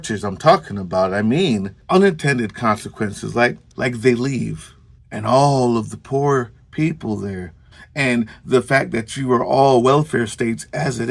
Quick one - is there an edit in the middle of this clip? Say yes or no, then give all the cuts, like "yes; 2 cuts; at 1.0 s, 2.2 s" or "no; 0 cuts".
yes; 1 cut; at 3.7 s